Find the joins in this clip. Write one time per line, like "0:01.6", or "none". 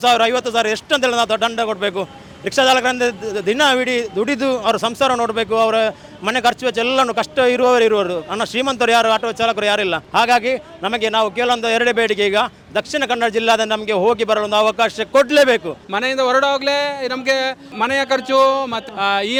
none